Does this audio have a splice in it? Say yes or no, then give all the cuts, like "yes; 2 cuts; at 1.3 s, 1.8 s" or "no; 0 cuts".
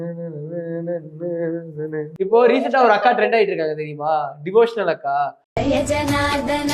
yes; 1 cut; at 2.1 s